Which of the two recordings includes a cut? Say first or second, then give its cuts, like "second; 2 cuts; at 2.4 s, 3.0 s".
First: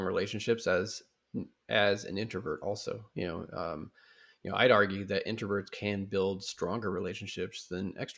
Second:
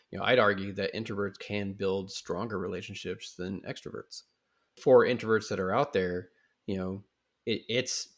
second; 1 cut; at 4.8 s